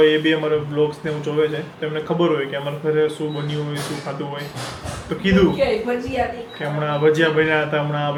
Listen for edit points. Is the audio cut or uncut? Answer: uncut